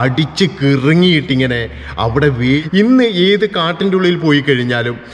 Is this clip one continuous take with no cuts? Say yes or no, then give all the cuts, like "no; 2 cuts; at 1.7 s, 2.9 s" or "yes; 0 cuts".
no; 1 cut; at 2.6 s